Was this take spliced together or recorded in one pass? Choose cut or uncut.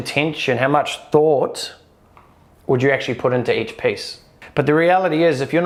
uncut